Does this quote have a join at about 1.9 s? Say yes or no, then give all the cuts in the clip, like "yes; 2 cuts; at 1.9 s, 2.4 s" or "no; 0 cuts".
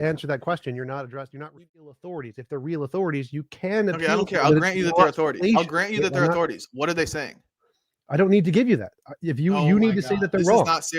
yes; 1 cut; at 1.9 s